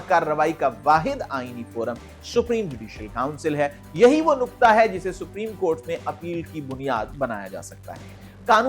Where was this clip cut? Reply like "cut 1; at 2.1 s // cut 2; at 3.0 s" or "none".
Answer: none